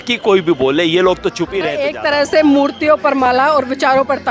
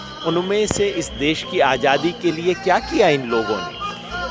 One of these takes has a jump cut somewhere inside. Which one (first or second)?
first